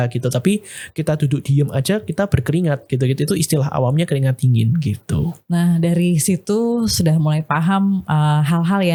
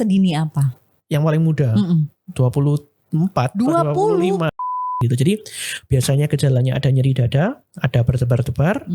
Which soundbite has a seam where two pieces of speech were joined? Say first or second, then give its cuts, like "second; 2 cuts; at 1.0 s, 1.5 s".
second; 1 cut; at 4.8 s